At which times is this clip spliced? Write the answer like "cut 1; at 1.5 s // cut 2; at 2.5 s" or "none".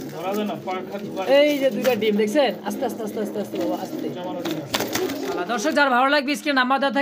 cut 1; at 5.4 s